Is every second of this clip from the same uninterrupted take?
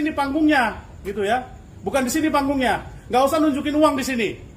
yes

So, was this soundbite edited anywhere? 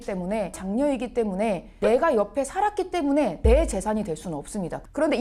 no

